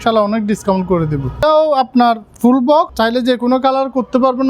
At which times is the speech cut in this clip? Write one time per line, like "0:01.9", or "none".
0:01.4
0:02.9

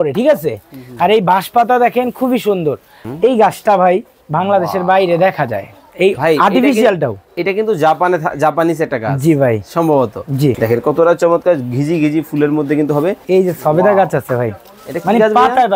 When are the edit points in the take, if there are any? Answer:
0:02.9
0:10.6
0:13.2

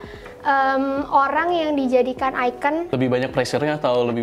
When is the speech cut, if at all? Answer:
0:02.9

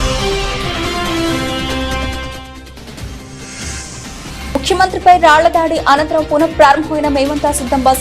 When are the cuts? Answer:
0:02.0

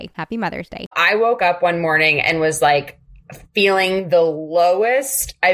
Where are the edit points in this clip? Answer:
0:00.9

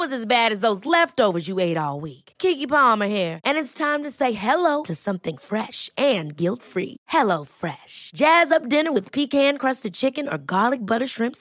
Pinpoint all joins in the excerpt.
none

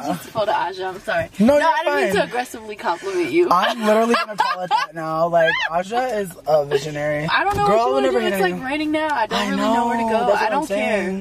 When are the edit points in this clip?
0:03.3

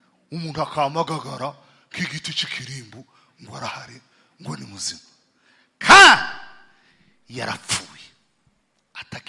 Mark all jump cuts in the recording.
none

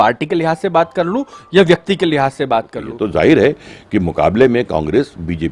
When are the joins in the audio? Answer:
0:02.8

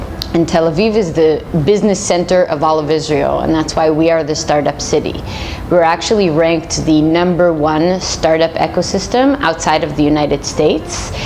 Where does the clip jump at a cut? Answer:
0:05.1

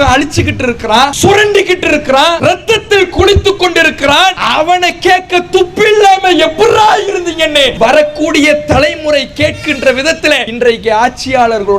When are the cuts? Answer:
0:01.1
0:02.4
0:04.4
0:07.7
0:10.5

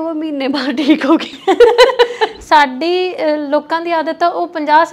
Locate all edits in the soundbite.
0:02.4

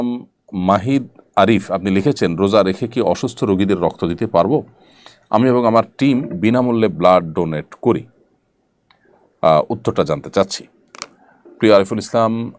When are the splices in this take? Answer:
none

